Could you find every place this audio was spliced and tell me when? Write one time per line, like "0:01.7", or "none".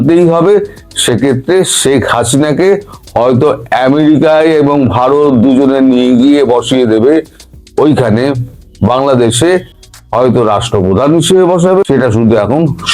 0:11.8